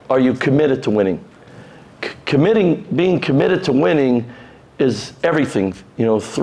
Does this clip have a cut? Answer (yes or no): no